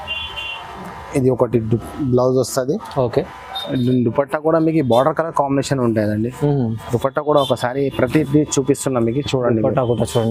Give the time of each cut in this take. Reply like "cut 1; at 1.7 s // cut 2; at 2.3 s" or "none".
none